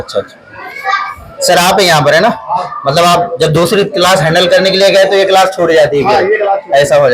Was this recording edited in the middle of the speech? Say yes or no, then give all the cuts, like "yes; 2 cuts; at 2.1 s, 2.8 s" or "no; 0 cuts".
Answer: no; 0 cuts